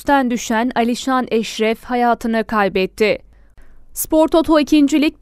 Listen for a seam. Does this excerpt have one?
yes; 1 cut; at 3.5 s

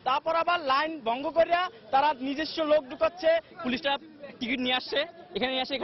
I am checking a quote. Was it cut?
no; 0 cuts

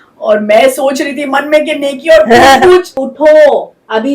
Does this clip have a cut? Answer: yes; 1 cut; at 2.9 s

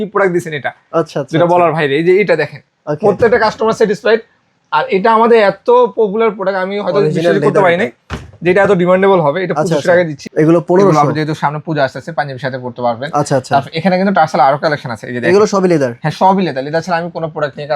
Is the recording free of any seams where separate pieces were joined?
no; 1 cut; at 10.2 s

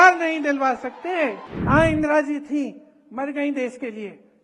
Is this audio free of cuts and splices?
no; 1 cut; at 1.5 s

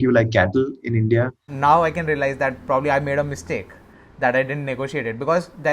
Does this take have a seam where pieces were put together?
yes; 1 cut; at 1.4 s

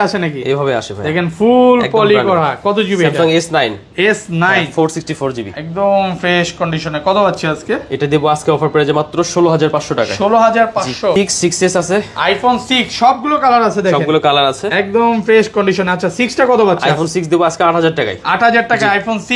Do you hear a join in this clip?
yes; 1 cut; at 11.2 s

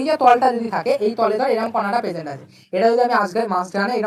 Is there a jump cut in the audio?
no; 0 cuts

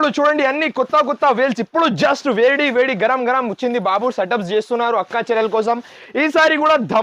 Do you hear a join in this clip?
no; 0 cuts

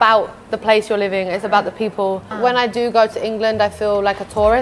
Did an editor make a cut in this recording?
yes; 1 cut; at 2.3 s

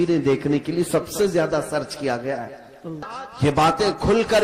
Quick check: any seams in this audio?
yes; 1 cut; at 3.1 s

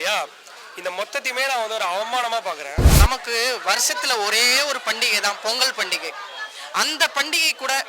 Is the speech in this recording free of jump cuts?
no; 1 cut; at 2.8 s

